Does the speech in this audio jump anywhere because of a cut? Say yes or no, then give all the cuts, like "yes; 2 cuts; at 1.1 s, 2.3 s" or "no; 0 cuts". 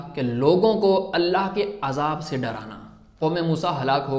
yes; 1 cut; at 3.2 s